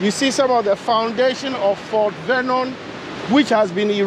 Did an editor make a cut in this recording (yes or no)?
no